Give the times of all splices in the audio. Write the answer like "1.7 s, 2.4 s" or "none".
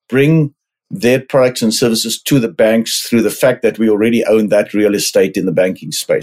none